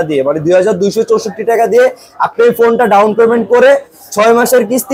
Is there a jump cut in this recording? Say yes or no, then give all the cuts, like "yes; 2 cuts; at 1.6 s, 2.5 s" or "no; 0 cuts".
no; 0 cuts